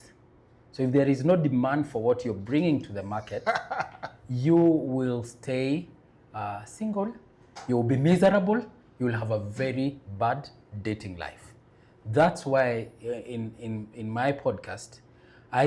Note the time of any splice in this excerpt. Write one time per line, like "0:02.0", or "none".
none

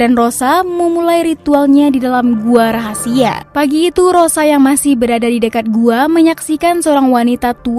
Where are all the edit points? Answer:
0:03.4

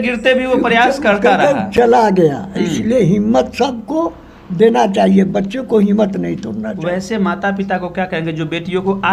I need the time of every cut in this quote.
none

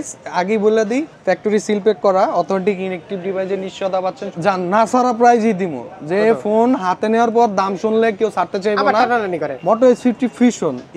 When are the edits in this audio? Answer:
0:01.1
0:04.2
0:09.5

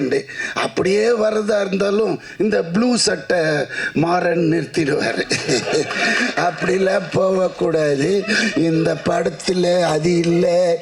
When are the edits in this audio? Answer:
none

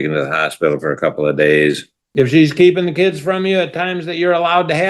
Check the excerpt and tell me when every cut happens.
0:01.9

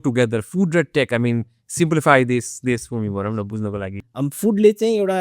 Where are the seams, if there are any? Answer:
0:04.0

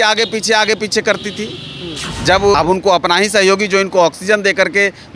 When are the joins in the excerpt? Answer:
0:02.5

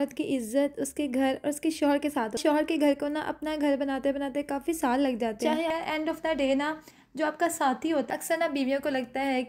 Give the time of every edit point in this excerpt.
0:02.4
0:05.7
0:08.1

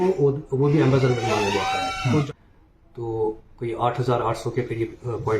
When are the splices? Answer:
0:02.2

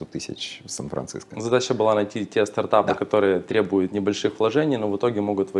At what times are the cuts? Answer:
none

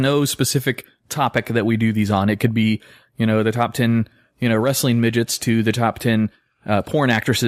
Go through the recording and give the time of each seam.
none

